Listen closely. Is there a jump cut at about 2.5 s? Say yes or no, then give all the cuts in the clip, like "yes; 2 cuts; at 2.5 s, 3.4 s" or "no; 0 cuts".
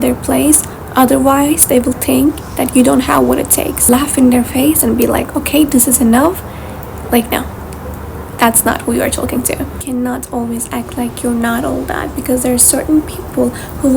no; 2 cuts; at 3.9 s, 9.7 s